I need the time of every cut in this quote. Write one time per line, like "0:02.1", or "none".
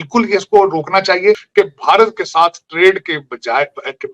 0:01.4